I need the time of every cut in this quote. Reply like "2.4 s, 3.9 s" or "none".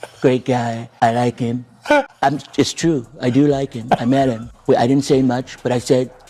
0.8 s, 2.1 s, 4.5 s